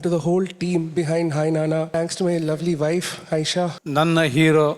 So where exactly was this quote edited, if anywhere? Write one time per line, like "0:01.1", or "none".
0:01.9
0:03.8